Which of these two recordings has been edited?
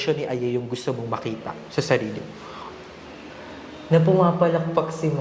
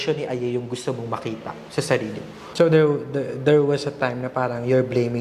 second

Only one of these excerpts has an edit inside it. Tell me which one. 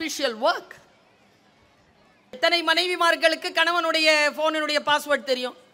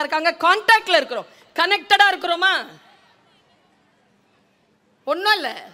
first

